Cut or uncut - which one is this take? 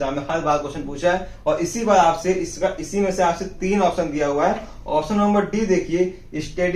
uncut